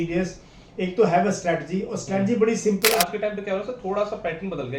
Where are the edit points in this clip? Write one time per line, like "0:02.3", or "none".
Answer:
0:02.9